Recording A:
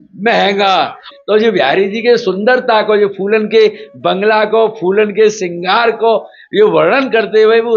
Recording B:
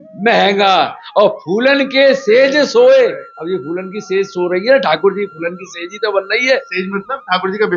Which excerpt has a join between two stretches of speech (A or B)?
A